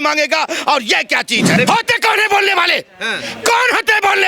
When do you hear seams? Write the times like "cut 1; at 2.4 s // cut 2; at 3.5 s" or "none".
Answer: cut 1; at 1.6 s